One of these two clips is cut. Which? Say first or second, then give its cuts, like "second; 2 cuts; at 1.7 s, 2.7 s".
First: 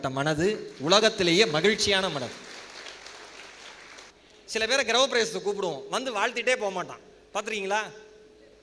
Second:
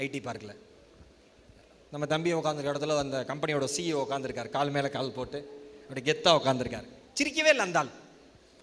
first; 1 cut; at 4.1 s